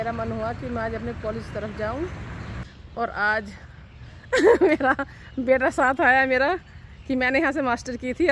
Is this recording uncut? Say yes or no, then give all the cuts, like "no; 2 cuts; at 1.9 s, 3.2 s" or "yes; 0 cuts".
no; 1 cut; at 2.5 s